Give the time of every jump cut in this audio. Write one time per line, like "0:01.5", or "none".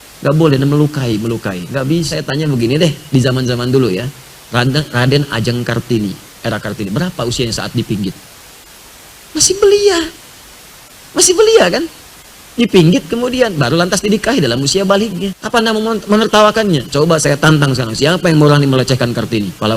0:02.2
0:15.3